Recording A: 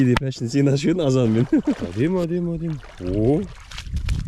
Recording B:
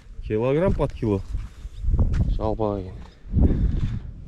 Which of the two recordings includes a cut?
A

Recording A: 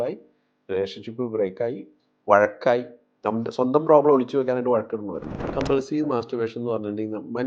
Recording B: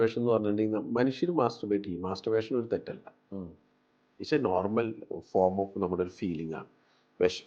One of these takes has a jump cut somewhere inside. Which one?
A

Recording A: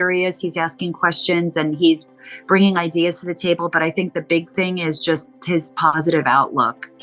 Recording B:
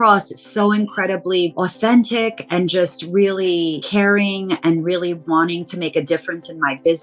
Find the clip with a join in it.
B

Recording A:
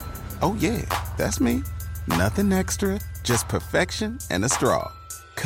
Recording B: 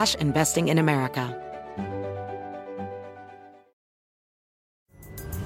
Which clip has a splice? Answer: B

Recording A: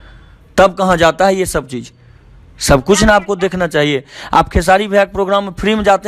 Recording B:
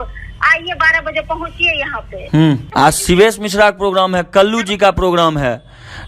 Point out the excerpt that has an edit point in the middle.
B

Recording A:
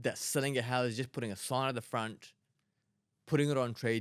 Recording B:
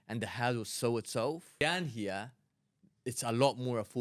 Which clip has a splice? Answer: B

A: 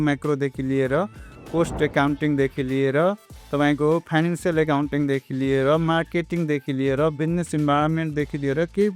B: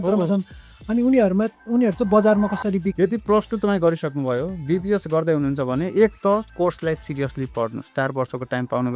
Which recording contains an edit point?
B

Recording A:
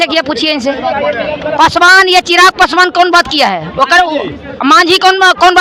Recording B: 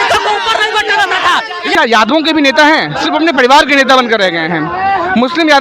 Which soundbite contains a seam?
B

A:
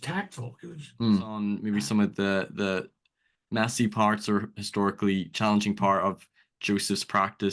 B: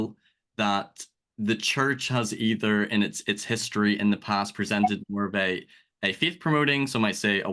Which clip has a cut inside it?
A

